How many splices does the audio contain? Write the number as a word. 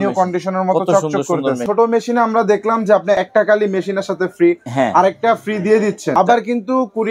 three